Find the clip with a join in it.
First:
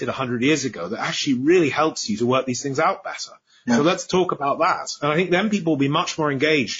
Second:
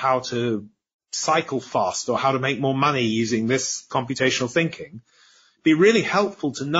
second; 1 cut; at 3.9 s

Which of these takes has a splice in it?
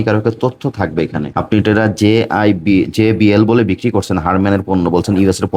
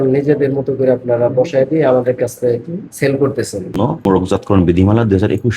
second; 1 cut; at 3.9 s

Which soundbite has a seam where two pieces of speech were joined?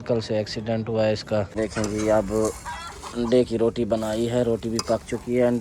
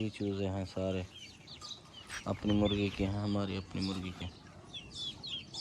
first; 1 cut; at 1.5 s

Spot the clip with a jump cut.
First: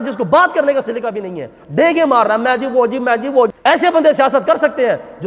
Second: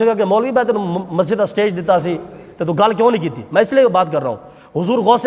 first; 1 cut; at 3.6 s

